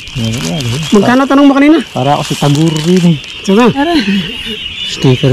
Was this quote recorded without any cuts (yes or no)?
no